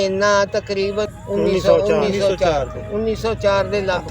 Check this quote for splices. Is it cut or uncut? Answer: cut